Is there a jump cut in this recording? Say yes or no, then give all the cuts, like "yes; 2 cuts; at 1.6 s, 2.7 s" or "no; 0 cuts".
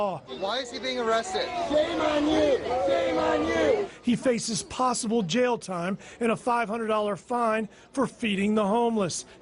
yes; 1 cut; at 7.3 s